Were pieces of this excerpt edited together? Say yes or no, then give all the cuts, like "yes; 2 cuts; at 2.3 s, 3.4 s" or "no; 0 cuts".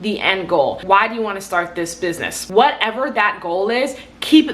yes; 2 cuts; at 0.8 s, 2.3 s